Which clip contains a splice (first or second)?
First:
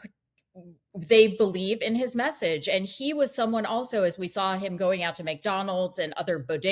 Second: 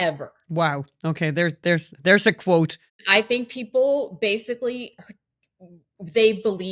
second